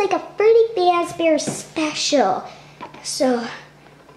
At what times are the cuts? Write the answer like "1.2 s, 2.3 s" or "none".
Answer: none